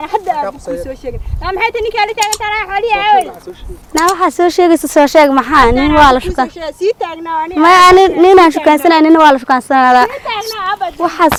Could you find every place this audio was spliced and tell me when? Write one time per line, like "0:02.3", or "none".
none